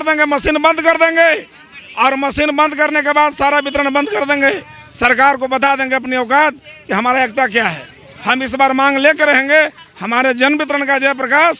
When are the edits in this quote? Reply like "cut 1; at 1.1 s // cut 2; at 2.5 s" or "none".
none